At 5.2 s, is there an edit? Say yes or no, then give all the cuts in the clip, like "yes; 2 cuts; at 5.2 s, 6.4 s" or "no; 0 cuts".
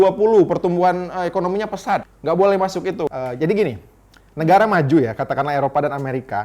no; 2 cuts; at 2.1 s, 3.1 s